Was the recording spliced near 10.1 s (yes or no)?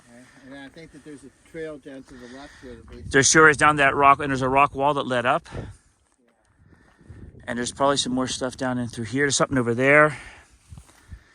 yes